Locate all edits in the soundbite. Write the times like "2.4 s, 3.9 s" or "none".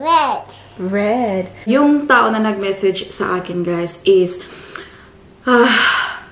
1.7 s